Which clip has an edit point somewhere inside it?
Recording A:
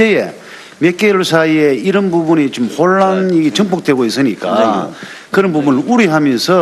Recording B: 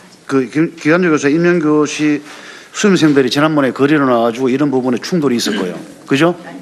A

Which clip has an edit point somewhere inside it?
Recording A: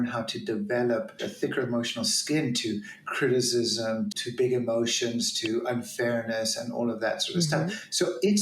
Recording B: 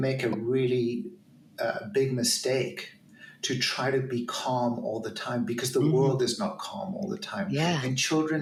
A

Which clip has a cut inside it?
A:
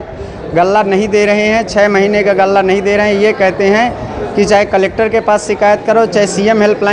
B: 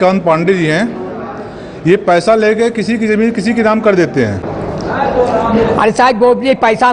B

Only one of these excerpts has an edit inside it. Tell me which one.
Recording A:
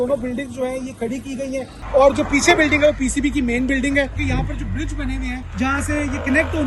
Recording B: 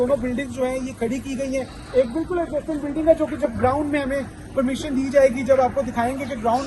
A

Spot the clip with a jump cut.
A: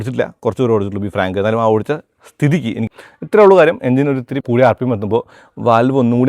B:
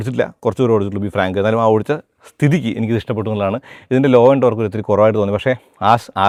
A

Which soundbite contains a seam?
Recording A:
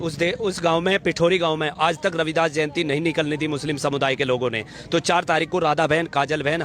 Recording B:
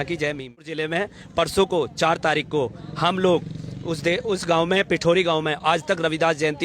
B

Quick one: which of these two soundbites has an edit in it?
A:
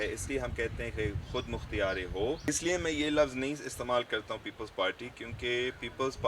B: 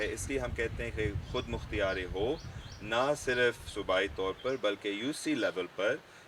A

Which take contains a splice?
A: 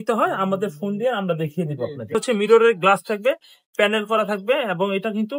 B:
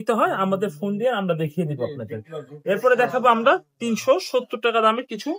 A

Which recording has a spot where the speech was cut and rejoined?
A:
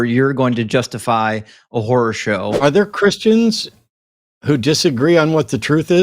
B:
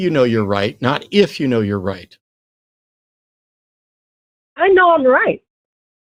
A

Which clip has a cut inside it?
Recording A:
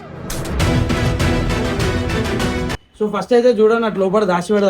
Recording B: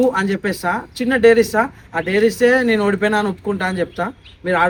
A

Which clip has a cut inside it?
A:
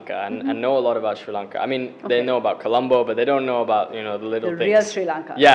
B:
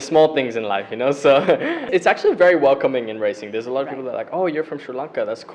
B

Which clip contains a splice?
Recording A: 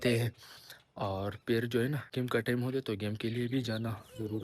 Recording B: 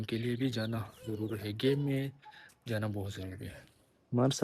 A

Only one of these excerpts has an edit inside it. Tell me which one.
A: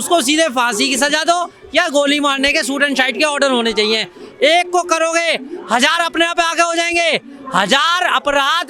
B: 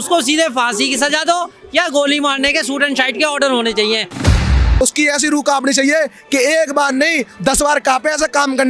B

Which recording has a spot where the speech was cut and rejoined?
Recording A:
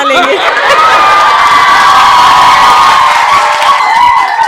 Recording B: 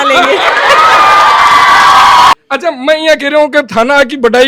B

